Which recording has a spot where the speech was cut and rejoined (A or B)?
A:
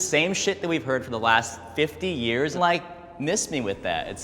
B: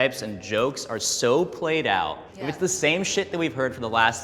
A